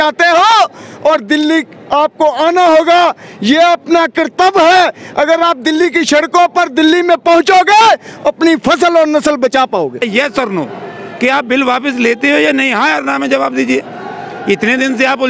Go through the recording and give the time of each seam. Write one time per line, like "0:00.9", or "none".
0:10.0